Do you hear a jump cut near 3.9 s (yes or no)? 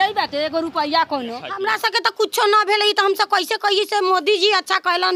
no